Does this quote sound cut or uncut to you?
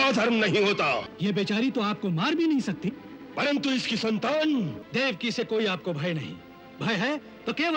cut